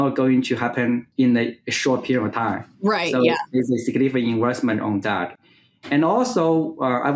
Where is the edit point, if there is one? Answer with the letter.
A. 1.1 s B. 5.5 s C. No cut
A